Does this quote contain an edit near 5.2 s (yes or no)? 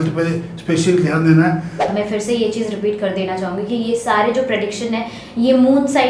no